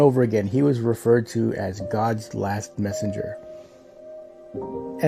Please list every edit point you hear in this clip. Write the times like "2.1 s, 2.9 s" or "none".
3.3 s